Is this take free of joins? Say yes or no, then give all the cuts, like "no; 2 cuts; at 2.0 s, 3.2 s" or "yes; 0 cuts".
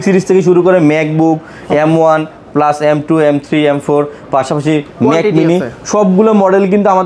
yes; 0 cuts